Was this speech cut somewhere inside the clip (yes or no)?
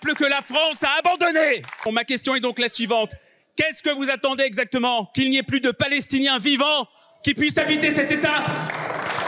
yes